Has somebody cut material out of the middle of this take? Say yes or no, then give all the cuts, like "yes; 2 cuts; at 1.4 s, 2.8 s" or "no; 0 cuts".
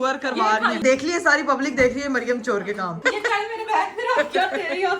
yes; 2 cuts; at 0.8 s, 3.0 s